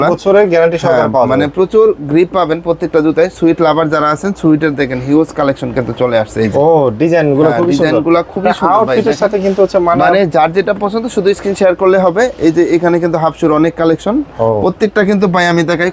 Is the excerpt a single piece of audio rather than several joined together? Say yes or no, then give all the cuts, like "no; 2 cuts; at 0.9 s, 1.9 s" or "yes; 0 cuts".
yes; 0 cuts